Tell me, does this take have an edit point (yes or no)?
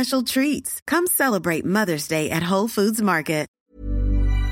yes